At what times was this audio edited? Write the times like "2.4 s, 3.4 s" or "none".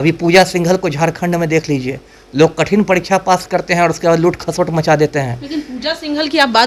none

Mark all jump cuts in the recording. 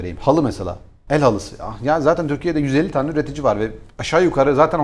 none

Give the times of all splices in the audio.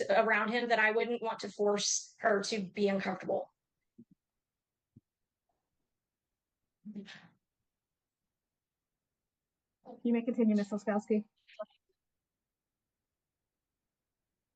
none

